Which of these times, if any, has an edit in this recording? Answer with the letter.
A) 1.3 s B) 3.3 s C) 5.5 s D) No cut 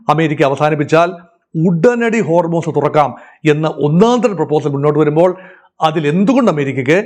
D